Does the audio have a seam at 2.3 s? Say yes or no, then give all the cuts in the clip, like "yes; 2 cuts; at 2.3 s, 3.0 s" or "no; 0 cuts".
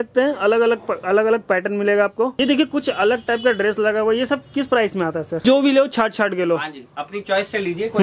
yes; 2 cuts; at 2.3 s, 5.4 s